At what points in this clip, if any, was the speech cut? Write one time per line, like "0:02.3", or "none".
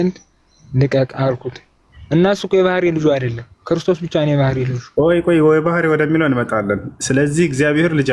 none